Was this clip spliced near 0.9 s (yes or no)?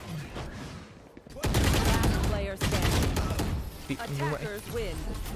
no